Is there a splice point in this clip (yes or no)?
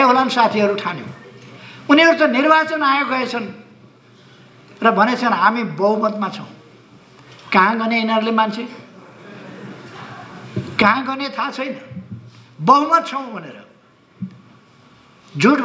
no